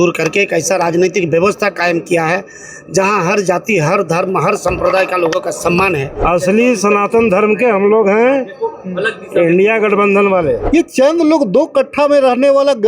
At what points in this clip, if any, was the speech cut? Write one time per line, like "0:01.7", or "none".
0:06.2
0:10.6